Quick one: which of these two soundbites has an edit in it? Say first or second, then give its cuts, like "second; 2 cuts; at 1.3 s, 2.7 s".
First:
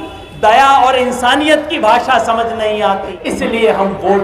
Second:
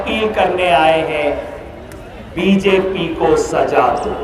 first; 1 cut; at 3.2 s